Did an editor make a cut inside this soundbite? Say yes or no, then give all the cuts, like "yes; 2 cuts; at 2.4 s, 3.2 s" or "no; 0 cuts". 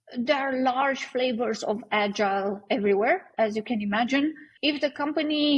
yes; 1 cut; at 4.5 s